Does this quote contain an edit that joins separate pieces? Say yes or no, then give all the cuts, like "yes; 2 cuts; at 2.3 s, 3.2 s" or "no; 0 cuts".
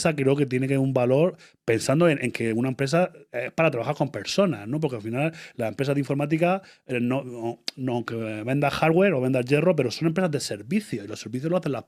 no; 0 cuts